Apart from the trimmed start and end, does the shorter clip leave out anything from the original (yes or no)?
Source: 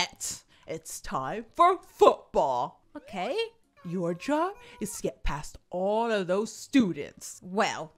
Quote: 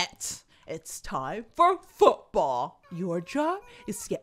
yes